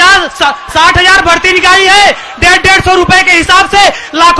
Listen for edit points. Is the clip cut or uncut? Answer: uncut